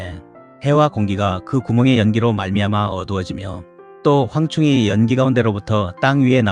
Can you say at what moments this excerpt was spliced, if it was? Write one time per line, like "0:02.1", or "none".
0:04.1